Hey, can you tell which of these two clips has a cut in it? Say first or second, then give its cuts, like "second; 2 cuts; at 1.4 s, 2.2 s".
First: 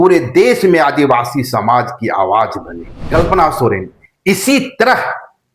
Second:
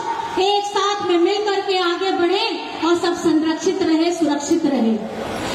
first; 1 cut; at 3.0 s